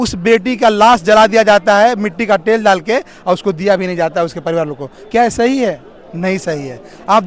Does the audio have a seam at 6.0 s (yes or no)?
no